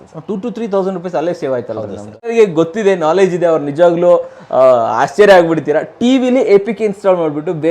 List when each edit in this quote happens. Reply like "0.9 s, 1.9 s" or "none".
2.3 s